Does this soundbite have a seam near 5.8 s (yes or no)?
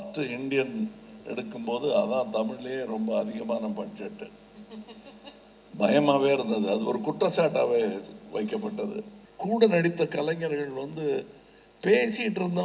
no